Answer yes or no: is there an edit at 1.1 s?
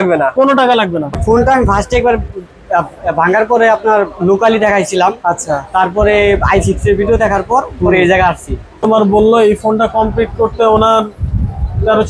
yes